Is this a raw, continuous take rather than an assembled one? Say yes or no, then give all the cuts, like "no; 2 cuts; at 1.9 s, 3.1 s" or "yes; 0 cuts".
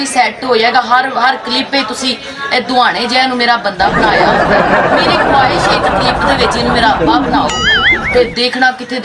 yes; 0 cuts